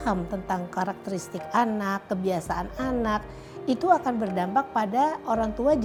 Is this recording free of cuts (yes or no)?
yes